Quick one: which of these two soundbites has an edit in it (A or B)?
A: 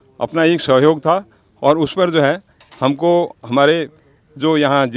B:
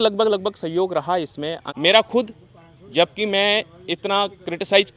B